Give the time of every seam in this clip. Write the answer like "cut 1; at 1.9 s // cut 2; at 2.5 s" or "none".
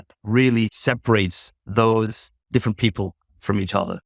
cut 1; at 1.1 s